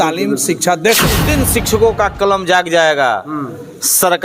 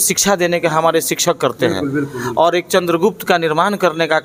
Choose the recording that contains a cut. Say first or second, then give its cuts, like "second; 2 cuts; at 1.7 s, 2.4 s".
first; 1 cut; at 1.2 s